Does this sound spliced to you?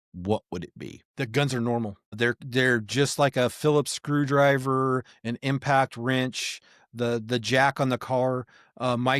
yes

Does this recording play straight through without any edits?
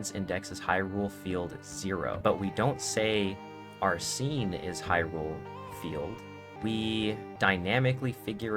no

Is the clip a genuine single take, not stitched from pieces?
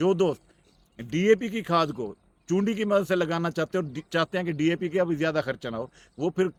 yes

